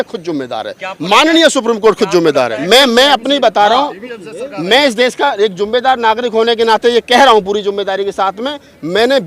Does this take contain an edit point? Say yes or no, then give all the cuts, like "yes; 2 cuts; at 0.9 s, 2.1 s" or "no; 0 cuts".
yes; 1 cut; at 2.6 s